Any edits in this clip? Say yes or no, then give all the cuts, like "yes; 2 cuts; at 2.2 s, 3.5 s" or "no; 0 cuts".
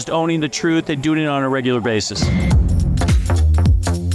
no; 0 cuts